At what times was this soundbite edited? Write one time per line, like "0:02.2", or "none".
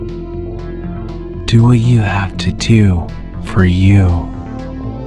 0:00.9
0:04.1

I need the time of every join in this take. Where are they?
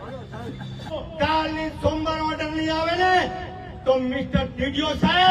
0:01.0

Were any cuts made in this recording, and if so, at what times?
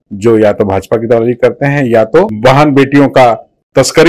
0:02.3

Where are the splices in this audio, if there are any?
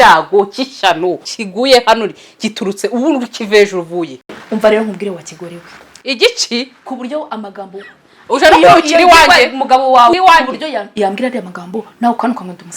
0:01.2
0:10.1

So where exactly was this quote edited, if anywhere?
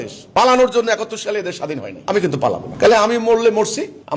none

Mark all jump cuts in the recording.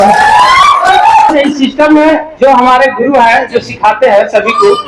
0:01.3

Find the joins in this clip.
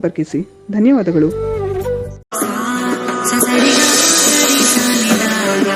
0:02.2

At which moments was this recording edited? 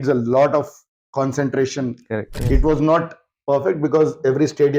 0:02.4

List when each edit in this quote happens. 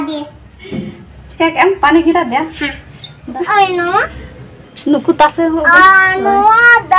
0:03.2

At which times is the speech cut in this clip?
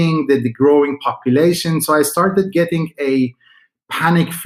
none

